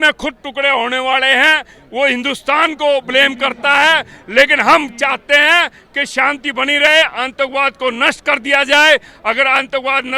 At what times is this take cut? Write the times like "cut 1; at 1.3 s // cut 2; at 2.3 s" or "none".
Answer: none

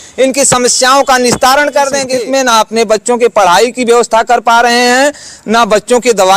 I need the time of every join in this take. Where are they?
cut 1; at 2.1 s

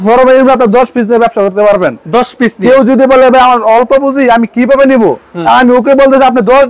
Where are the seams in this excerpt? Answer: none

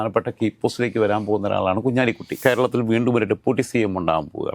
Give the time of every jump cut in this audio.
cut 1; at 2.3 s

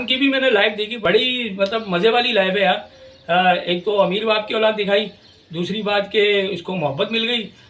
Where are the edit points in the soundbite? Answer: cut 1; at 0.9 s

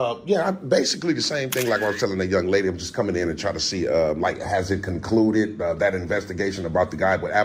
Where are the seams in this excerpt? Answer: none

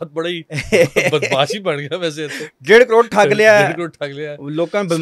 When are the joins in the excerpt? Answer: none

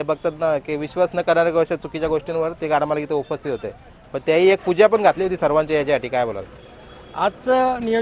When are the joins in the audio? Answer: none

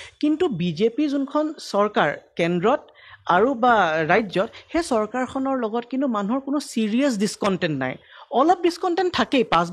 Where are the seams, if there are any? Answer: none

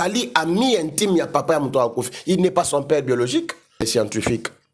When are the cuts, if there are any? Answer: cut 1; at 3.8 s

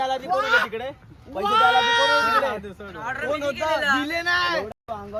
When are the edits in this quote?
none

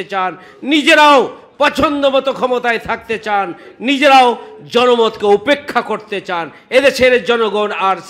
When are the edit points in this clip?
none

